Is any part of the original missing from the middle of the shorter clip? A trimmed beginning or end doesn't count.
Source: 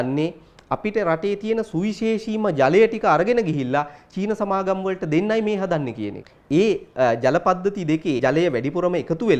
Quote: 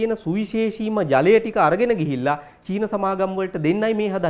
no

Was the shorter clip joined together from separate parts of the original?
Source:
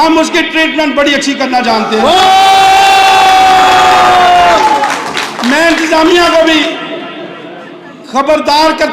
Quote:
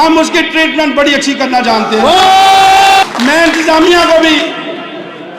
yes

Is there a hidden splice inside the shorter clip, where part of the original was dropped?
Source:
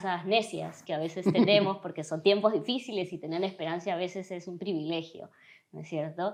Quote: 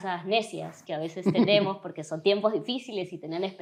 no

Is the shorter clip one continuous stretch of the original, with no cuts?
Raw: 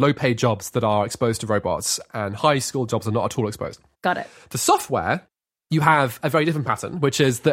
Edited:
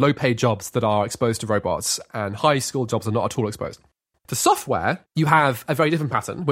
no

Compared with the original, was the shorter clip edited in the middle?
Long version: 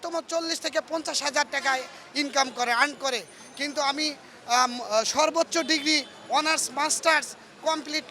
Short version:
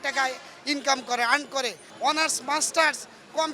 yes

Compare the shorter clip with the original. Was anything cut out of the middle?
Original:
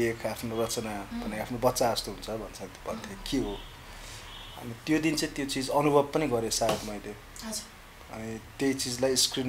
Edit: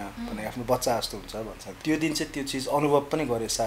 yes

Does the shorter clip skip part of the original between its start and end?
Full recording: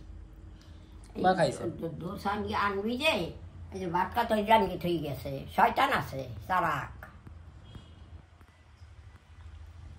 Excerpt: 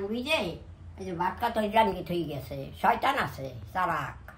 no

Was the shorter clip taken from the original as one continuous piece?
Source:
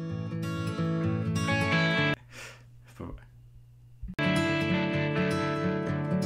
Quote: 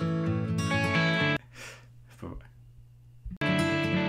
yes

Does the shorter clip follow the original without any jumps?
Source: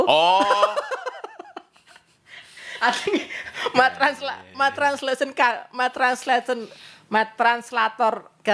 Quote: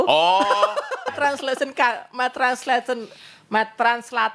no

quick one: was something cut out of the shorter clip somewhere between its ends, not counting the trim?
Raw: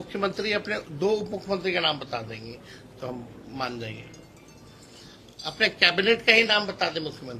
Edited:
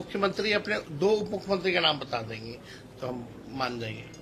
no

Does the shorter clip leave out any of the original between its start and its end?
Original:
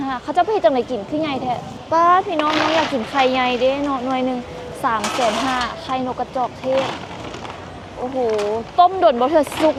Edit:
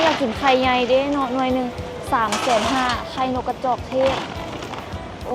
no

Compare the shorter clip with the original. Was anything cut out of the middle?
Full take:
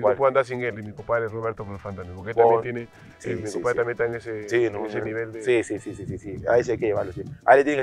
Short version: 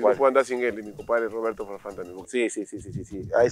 yes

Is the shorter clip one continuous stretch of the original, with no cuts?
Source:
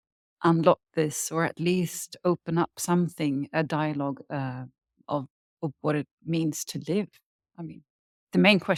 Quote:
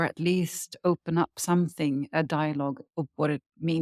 no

